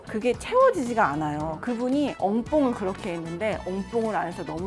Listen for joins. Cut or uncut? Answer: cut